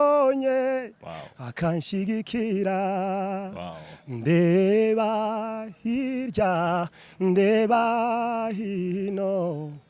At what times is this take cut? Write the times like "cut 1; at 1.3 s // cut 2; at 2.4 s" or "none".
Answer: none